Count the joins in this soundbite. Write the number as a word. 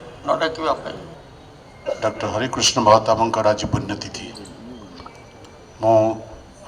one